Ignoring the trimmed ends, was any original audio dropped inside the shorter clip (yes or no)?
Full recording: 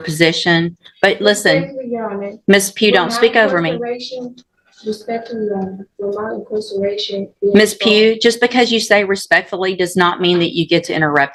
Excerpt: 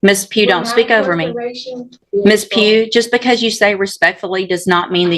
yes